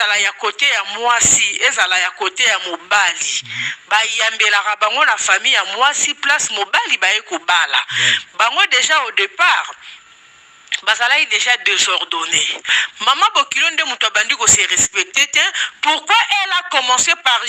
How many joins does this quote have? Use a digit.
1